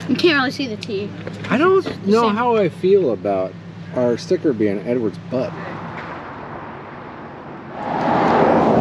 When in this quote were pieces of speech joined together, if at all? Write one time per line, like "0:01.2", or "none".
none